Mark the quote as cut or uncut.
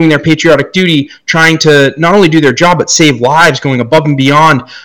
uncut